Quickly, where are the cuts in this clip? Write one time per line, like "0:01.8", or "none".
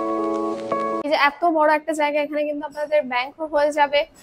0:01.1